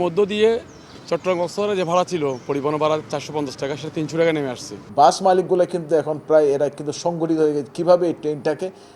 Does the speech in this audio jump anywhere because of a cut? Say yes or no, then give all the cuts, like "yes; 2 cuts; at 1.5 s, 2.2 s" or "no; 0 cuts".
yes; 1 cut; at 4.8 s